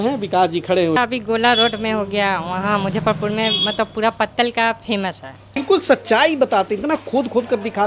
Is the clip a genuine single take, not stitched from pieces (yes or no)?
no